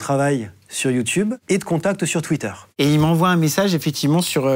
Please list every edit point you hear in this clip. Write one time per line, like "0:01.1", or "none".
0:02.6